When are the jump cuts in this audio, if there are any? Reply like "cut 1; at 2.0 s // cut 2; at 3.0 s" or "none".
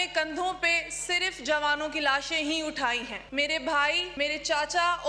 cut 1; at 3.2 s // cut 2; at 4.1 s